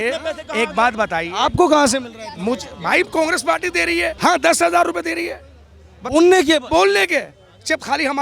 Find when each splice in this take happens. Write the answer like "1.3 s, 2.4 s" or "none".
4.1 s